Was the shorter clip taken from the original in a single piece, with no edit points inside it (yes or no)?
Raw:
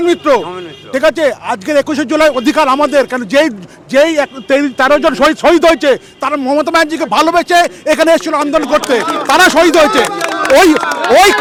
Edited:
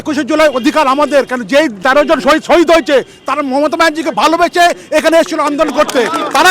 no